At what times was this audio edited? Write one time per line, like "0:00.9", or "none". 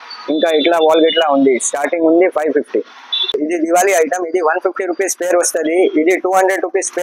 0:03.2